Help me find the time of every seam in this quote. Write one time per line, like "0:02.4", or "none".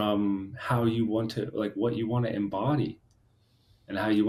none